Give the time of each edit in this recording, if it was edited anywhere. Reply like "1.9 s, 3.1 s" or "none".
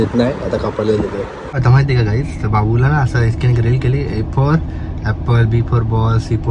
1.4 s